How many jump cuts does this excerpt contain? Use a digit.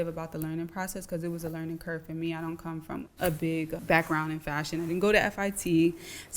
2